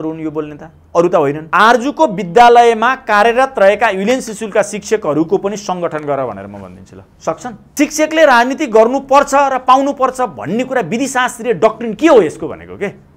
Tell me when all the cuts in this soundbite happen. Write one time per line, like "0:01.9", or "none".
0:01.4
0:07.6